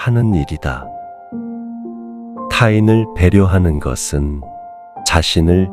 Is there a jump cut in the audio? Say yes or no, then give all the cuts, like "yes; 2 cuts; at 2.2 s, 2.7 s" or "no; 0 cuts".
yes; 2 cuts; at 0.8 s, 2.2 s